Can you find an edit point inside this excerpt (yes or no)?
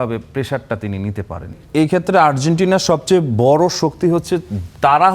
yes